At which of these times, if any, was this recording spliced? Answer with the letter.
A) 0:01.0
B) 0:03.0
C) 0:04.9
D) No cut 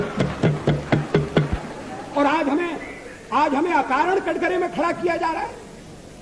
D